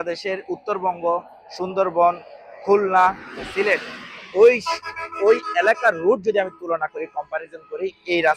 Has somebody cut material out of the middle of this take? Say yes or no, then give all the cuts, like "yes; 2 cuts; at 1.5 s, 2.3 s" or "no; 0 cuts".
no; 0 cuts